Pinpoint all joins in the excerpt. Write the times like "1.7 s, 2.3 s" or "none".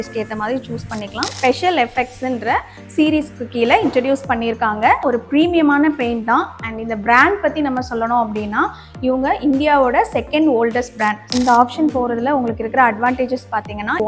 1.3 s, 11.3 s